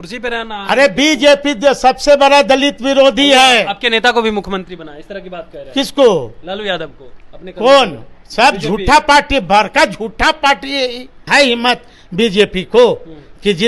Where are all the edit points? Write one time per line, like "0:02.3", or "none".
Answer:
0:11.3